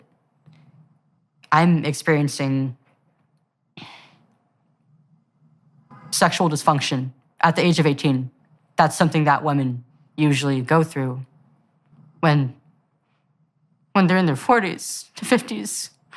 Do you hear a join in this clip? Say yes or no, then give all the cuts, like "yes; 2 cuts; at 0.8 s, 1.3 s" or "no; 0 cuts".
no; 0 cuts